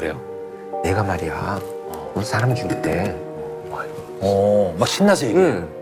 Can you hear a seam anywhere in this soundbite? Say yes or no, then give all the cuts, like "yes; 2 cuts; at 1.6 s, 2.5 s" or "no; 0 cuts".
no; 0 cuts